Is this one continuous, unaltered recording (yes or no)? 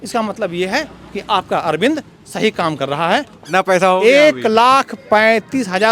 no